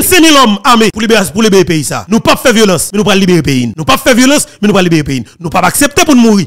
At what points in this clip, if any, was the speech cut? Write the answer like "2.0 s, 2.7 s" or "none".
1.0 s, 1.9 s, 2.9 s, 3.7 s